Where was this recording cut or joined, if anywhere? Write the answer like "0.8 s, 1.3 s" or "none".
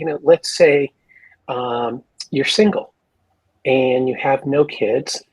none